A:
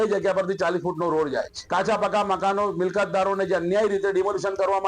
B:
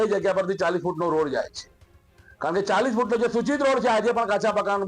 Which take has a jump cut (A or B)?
A